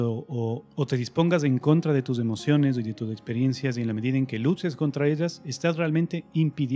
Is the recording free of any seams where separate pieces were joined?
yes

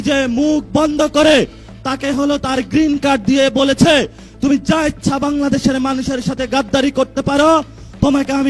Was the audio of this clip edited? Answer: no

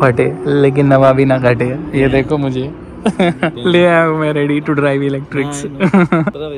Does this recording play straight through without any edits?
yes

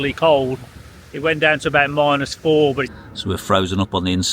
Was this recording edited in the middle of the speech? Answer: yes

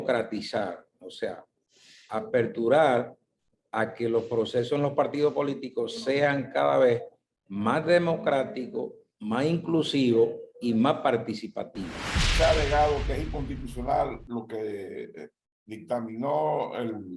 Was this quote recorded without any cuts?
no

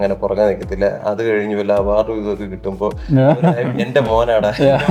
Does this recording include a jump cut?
no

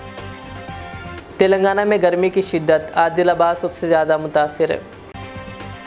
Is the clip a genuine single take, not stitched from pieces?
yes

